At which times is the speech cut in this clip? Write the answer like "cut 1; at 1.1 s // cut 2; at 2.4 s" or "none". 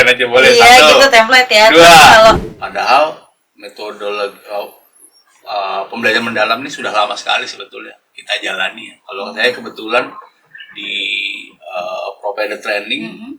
cut 1; at 2.6 s

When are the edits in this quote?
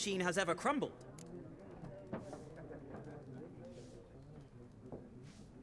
cut 1; at 1.0 s

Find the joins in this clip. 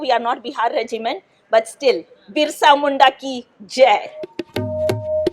cut 1; at 4.4 s

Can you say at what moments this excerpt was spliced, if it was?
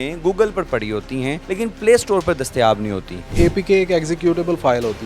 cut 1; at 1.4 s // cut 2; at 3.3 s

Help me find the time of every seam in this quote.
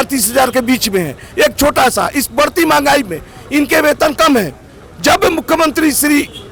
none

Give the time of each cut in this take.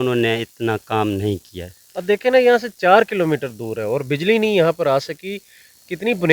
none

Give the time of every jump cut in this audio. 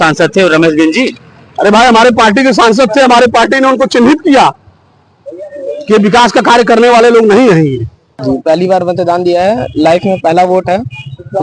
cut 1; at 8.2 s

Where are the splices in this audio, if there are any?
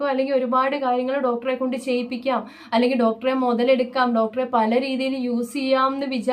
none

